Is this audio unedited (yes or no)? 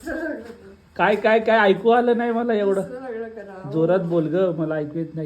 yes